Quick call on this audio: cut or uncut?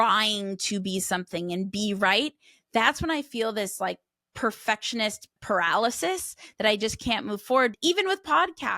cut